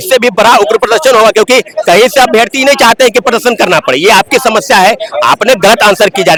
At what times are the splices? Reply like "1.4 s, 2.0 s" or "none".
none